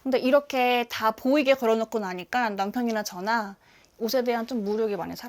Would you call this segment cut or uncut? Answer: uncut